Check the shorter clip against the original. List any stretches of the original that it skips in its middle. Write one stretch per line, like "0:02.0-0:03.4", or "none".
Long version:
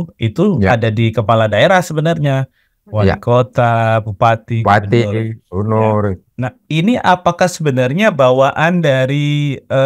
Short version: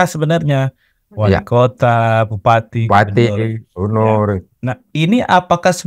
none